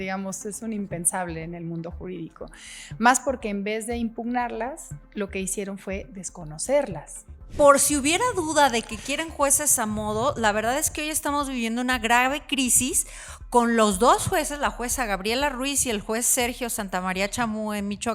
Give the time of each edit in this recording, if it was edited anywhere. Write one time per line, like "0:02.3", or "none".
0:07.5